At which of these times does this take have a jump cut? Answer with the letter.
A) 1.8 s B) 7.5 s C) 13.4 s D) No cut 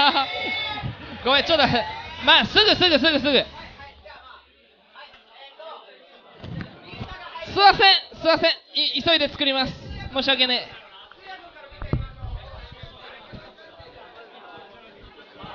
A